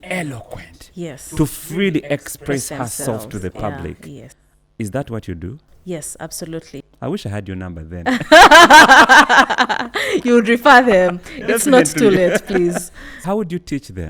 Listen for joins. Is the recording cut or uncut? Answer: cut